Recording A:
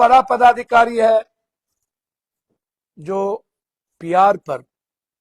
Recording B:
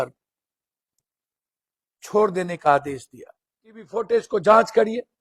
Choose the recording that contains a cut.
B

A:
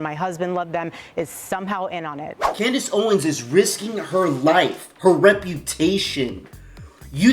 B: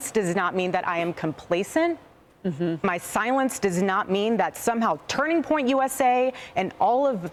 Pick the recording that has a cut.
A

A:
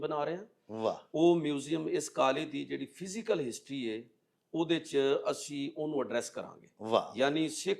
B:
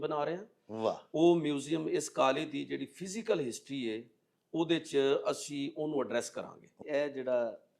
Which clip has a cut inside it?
B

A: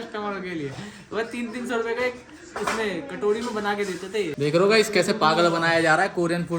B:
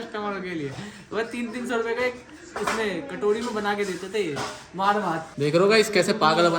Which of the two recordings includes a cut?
A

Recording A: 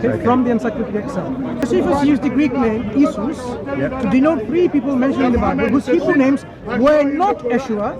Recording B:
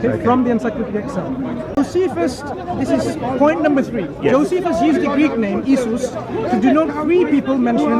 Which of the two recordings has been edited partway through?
A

